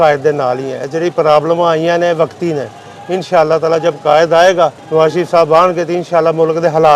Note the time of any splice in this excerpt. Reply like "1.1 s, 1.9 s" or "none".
4.8 s